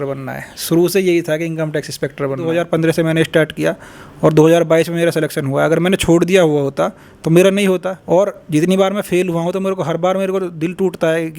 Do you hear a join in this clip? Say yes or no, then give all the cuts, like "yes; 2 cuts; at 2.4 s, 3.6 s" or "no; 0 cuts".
yes; 2 cuts; at 2.5 s, 7.9 s